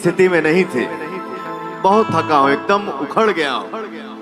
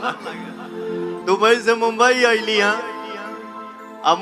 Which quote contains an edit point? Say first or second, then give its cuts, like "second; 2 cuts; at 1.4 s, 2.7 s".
second; 1 cut; at 1.2 s